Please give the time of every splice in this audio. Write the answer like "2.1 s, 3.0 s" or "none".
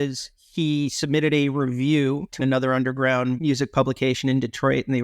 2.4 s, 3.4 s